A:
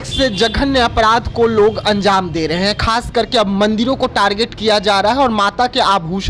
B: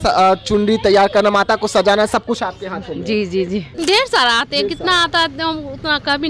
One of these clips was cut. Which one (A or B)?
B